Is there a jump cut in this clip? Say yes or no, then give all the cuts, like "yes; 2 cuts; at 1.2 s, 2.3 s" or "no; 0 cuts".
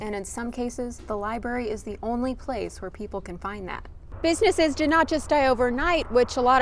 yes; 1 cut; at 4.1 s